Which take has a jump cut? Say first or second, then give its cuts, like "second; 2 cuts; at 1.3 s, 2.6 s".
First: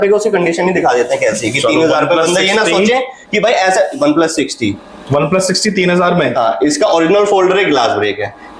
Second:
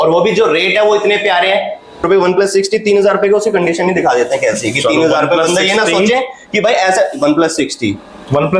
second; 1 cut; at 2.0 s